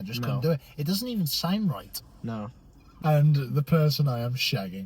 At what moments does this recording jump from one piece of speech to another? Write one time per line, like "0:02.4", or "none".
0:03.0